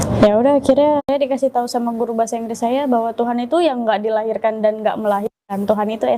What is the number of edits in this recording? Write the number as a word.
one